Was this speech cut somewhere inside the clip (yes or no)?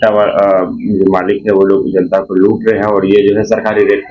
no